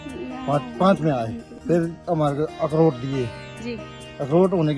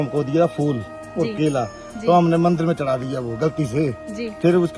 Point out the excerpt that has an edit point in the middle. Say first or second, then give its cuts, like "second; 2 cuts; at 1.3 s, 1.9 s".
first; 1 cut; at 1.5 s